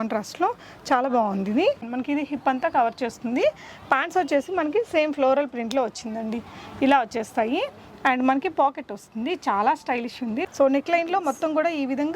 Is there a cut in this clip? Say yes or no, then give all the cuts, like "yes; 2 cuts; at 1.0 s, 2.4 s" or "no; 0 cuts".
yes; 2 cuts; at 1.9 s, 10.4 s